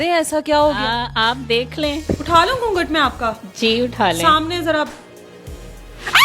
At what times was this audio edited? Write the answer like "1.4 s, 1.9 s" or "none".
2.0 s